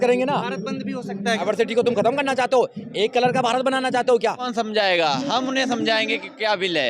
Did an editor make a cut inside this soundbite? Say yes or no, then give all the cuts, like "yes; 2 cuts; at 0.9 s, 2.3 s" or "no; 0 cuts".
yes; 2 cuts; at 1.4 s, 4.5 s